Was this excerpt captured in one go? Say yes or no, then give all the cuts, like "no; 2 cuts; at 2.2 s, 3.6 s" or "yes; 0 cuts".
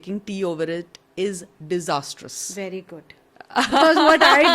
yes; 0 cuts